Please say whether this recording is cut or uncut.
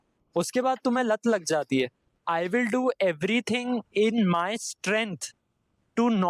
cut